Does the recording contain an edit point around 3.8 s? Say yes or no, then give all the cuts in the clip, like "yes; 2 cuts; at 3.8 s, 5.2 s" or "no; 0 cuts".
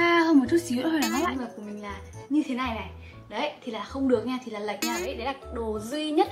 no; 2 cuts; at 1.3 s, 5.1 s